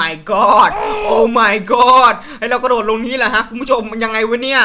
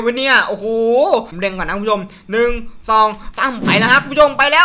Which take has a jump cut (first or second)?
second